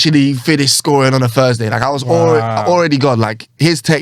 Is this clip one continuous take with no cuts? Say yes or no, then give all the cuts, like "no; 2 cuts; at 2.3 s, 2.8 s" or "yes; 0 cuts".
yes; 0 cuts